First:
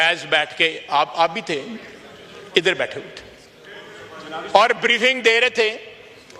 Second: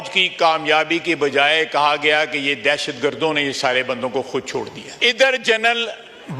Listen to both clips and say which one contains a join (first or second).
second